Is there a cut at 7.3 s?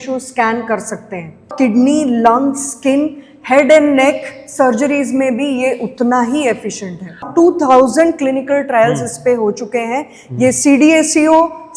yes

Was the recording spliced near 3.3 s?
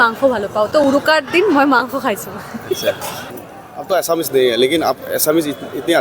yes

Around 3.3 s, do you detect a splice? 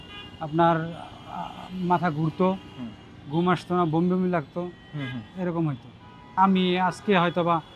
no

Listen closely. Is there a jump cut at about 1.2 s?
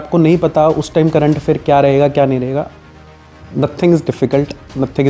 no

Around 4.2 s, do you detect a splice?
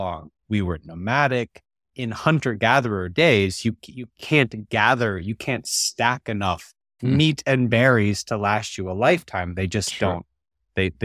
no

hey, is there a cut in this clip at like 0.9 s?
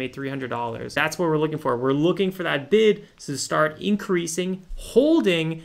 yes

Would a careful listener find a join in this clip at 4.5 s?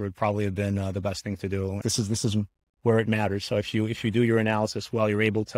no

